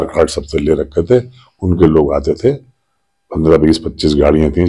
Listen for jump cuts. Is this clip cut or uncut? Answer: uncut